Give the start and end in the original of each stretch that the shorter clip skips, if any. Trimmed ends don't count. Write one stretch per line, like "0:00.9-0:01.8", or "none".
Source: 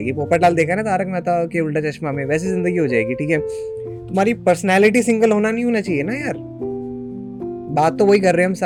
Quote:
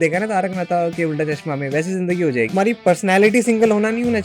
0:03.1-0:04.1